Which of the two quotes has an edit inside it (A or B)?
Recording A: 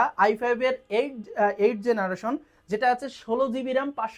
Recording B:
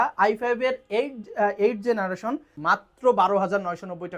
B